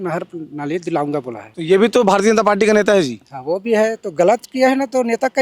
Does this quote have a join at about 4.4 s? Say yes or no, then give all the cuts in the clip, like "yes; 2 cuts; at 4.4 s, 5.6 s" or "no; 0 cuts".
no; 1 cut; at 1.4 s